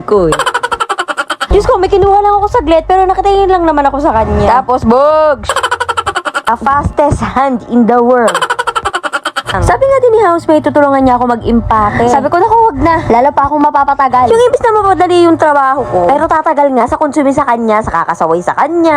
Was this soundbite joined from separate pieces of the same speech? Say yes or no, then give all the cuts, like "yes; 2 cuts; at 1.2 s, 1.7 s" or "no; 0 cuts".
yes; 3 cuts; at 1.4 s, 6.5 s, 9.6 s